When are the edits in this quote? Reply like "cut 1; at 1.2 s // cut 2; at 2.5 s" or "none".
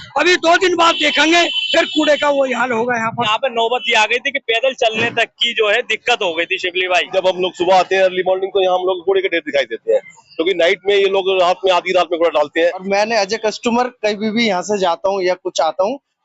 cut 1; at 3.2 s // cut 2; at 7.1 s // cut 3; at 12.8 s